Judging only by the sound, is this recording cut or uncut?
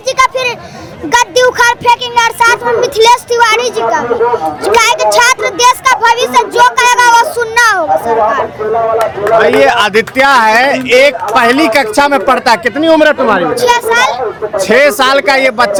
uncut